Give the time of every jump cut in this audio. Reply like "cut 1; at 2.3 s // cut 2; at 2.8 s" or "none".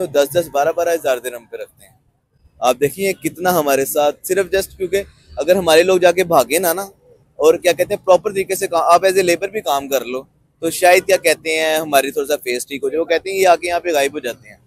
none